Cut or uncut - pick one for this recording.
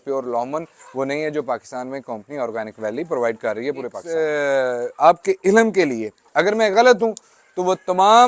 cut